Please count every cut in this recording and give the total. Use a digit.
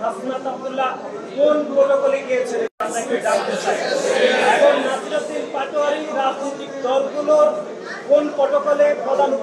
0